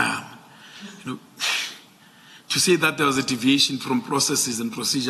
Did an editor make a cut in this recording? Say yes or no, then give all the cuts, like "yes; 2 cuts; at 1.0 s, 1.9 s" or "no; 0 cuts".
no; 0 cuts